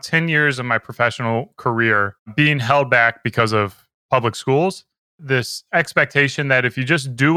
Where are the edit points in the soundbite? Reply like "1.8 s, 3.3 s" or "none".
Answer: 2.2 s, 5.2 s